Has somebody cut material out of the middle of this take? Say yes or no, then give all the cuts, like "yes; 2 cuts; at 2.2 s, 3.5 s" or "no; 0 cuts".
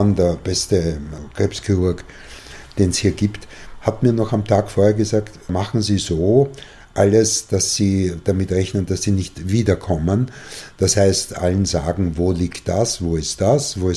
yes; 2 cuts; at 1.2 s, 5.5 s